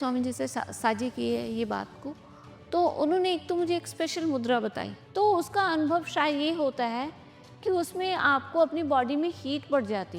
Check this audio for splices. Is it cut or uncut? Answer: cut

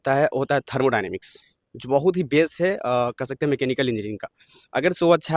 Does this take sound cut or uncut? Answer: uncut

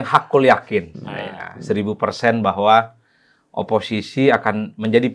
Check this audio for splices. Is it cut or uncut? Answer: uncut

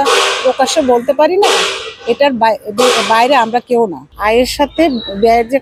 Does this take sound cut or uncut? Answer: cut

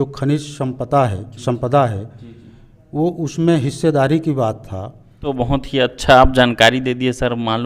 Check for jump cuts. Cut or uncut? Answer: cut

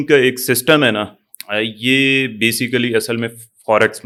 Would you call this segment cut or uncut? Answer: uncut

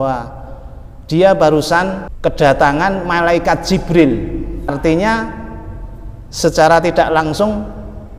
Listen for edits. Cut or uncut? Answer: cut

